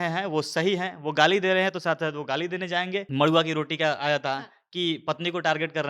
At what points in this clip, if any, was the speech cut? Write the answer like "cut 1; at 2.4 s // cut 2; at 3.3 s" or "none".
cut 1; at 3.1 s